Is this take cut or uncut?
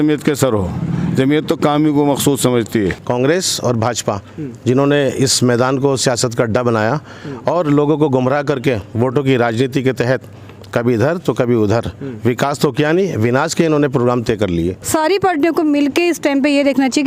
cut